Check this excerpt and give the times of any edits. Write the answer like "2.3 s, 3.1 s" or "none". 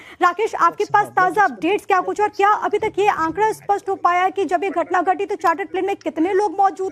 4.9 s

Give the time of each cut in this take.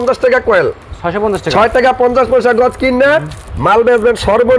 none

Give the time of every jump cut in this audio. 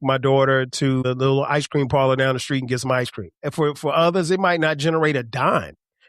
1.0 s, 3.4 s

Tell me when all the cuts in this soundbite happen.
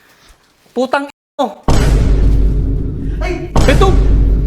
none

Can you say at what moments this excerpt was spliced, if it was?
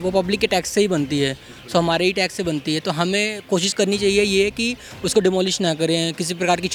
none

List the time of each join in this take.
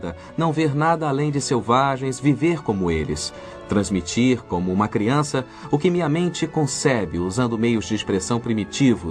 6.7 s

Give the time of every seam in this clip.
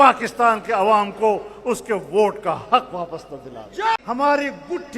4.0 s

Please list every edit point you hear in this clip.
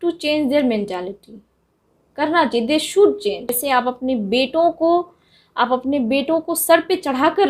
3.6 s

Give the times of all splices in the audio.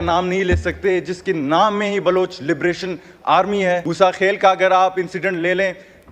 3.9 s

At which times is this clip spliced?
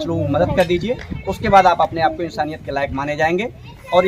none

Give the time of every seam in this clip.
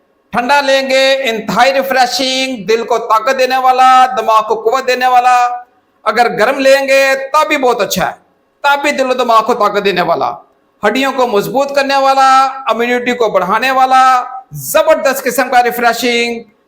none

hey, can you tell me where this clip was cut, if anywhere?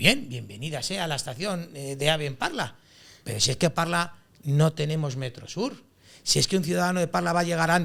none

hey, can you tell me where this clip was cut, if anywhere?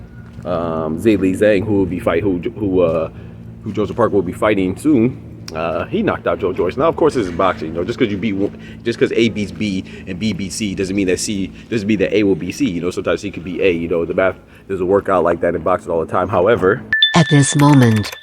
16.9 s

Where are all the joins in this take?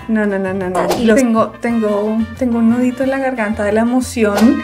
1.2 s

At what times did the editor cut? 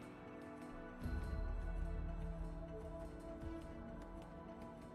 2.0 s

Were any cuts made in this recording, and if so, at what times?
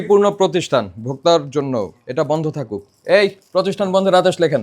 2.0 s

